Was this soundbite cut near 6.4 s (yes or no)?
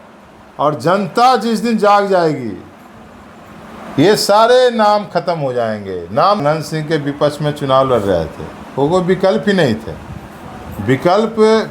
yes